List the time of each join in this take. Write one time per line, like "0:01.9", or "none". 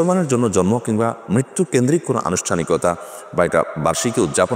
none